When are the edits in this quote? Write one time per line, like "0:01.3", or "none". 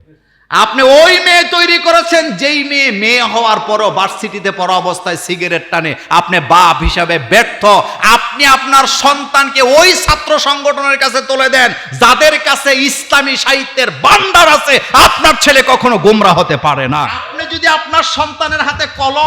0:17.2